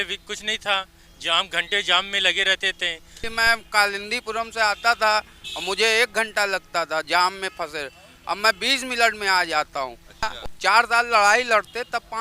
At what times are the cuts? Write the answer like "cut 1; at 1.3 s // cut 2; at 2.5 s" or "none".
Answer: cut 1; at 3.3 s // cut 2; at 10.2 s